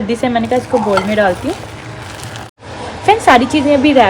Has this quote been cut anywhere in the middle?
yes; 1 cut; at 2.5 s

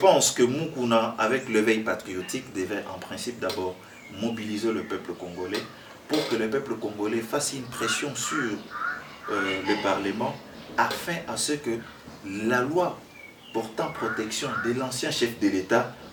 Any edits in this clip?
no; 0 cuts

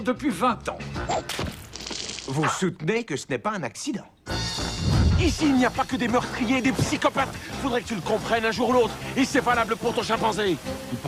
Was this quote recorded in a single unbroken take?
yes; 0 cuts

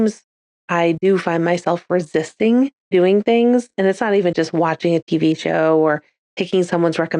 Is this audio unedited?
no; 1 cut; at 2.8 s

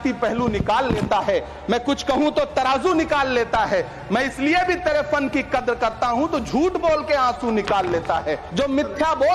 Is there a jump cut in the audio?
yes; 1 cut; at 8.4 s

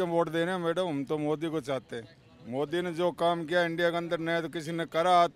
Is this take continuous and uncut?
yes; 0 cuts

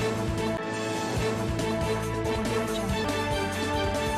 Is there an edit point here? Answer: no; 0 cuts

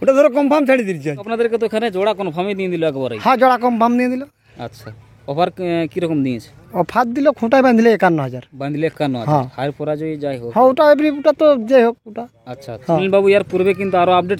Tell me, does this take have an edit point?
yes; 2 cuts; at 1.3 s, 13.0 s

